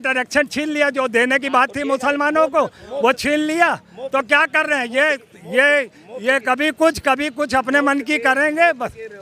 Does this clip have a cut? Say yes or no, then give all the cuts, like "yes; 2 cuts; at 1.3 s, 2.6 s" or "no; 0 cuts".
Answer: no; 0 cuts